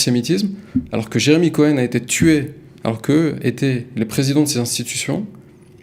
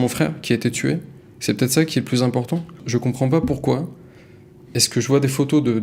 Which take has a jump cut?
second; 1 cut; at 2.8 s

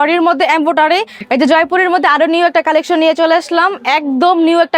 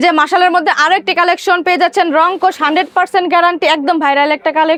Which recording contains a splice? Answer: first; 1 cut; at 1.1 s

